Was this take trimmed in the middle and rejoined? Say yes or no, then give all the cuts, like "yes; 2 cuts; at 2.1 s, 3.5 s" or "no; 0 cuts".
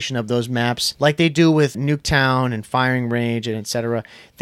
yes; 2 cuts; at 0.9 s, 1.8 s